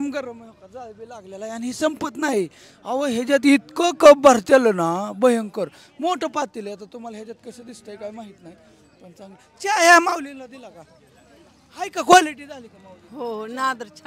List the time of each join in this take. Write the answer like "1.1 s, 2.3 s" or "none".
none